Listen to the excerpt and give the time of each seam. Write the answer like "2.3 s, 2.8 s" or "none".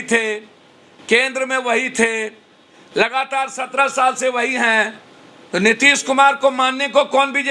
none